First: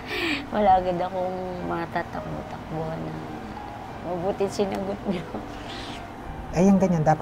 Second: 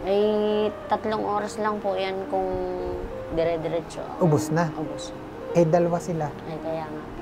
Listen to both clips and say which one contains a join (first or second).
first